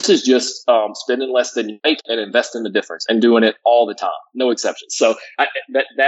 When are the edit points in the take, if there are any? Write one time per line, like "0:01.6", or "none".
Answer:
0:01.7